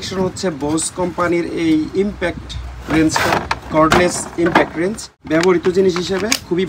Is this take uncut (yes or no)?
no